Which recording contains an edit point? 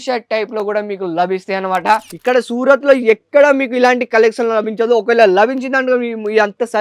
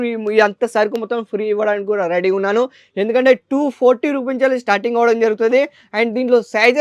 first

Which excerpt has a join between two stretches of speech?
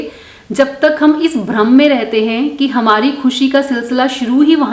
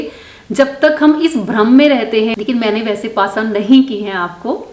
second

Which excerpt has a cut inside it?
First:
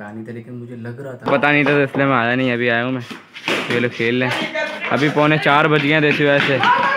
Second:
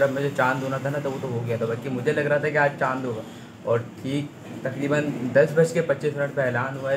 first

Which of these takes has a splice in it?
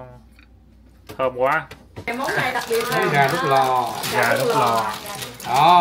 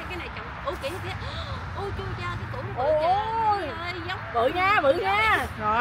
first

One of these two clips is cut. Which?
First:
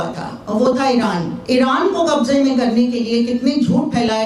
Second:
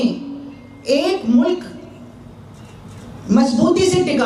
first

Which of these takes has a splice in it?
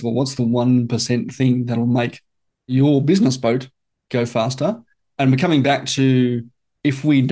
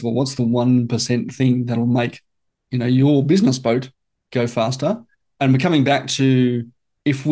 first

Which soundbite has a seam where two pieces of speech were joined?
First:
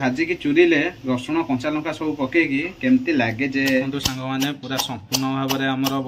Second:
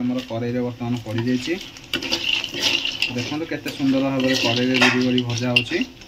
first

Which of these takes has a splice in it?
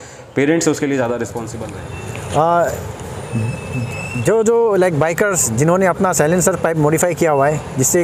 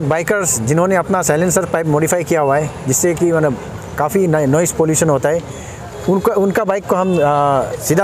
first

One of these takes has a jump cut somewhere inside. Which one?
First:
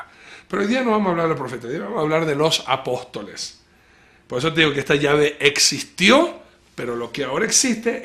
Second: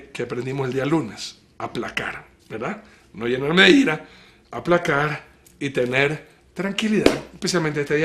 first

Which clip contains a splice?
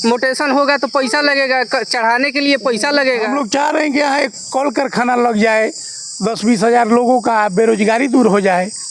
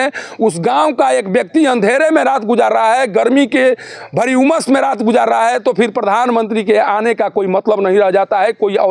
first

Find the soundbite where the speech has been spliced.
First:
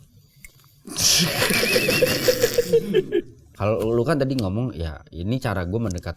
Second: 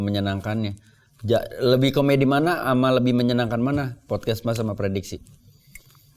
first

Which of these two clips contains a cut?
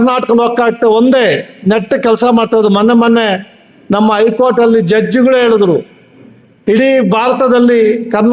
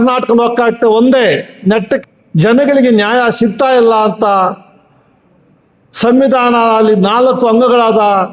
second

